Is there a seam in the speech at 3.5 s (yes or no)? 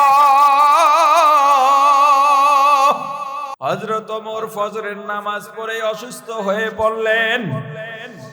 yes